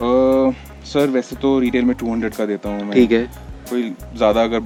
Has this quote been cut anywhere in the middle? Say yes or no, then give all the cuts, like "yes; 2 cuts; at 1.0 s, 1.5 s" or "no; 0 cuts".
no; 0 cuts